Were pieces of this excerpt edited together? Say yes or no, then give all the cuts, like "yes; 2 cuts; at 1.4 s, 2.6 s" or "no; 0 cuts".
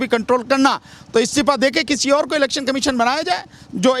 no; 0 cuts